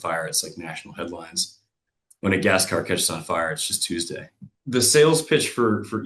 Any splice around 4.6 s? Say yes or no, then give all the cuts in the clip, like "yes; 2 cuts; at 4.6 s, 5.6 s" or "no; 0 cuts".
yes; 1 cut; at 4.6 s